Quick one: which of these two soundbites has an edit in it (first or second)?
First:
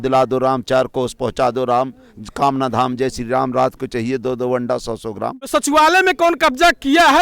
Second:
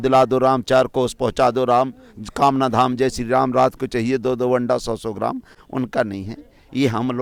first